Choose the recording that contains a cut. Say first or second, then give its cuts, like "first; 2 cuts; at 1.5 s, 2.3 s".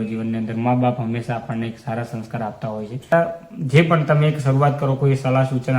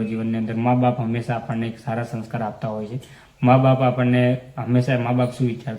first; 1 cut; at 3.1 s